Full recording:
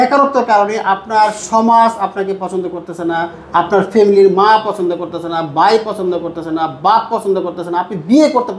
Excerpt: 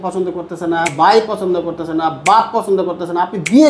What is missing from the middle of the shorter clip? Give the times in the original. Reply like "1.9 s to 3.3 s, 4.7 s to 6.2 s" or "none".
3.3 s to 5.5 s